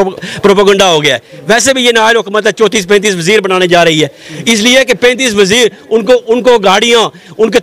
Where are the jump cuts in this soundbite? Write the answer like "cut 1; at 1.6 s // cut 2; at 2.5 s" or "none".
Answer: none